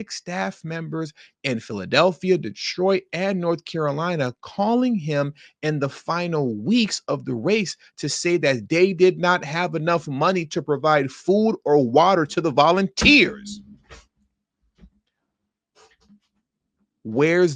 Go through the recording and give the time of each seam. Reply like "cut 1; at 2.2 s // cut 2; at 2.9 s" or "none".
none